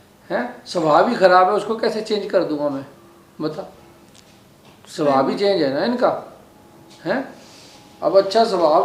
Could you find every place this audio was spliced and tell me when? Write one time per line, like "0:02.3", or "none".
none